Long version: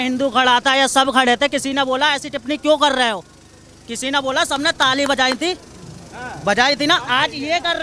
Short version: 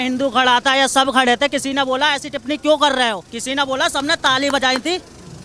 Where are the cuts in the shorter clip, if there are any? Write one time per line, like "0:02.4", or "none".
0:03.3